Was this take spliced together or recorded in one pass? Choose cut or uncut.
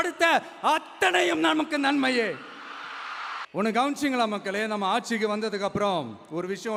uncut